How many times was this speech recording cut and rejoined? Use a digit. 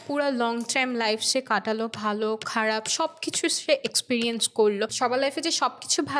1